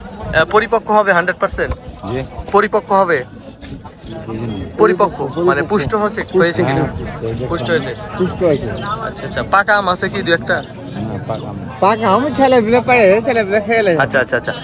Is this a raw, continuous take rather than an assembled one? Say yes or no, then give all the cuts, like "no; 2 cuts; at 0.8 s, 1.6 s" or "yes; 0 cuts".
yes; 0 cuts